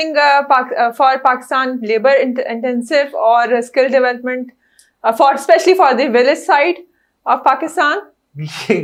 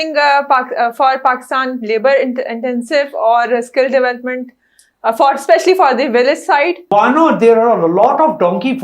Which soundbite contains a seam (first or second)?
second